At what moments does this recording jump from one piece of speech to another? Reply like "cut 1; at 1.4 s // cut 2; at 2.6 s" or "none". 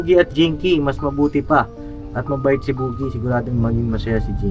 none